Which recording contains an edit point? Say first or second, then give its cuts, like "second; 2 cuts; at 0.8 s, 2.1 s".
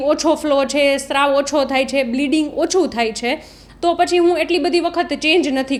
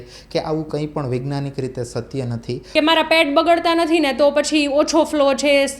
second; 1 cut; at 2.6 s